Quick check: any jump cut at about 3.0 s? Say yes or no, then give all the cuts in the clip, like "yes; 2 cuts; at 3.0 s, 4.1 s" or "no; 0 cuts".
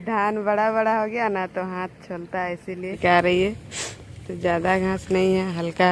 yes; 1 cut; at 3.0 s